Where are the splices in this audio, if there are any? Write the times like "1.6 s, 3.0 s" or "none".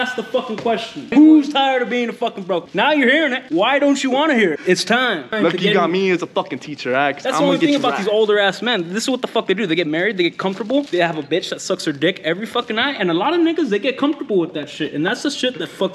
0.9 s, 2.7 s, 3.4 s, 5.3 s